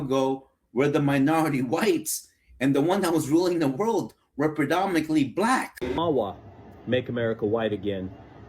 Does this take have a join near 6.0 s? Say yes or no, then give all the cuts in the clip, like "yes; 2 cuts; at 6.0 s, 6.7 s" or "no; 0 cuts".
yes; 1 cut; at 6.0 s